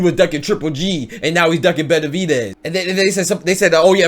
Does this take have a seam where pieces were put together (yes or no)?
yes